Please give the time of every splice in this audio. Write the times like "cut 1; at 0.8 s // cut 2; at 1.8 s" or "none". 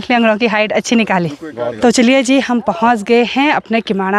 cut 1; at 1.7 s